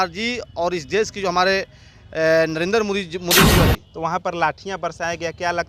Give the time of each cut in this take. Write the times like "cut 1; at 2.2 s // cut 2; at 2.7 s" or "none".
cut 1; at 3.7 s